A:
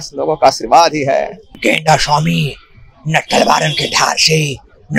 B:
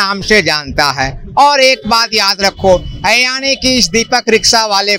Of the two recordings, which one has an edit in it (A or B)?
A